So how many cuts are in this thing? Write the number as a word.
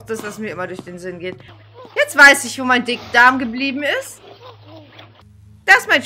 two